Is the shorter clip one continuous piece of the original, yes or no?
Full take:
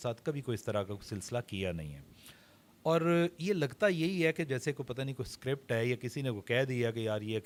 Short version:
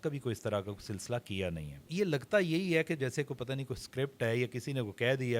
no